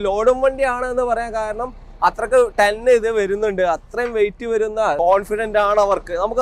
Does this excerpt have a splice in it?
yes; 1 cut; at 5.0 s

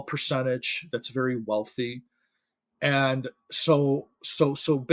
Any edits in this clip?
no; 0 cuts

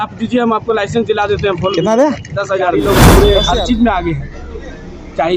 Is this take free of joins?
no; 1 cut; at 2.8 s

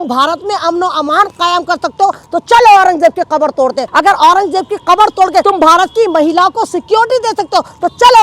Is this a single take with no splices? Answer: no; 2 cuts; at 3.8 s, 5.4 s

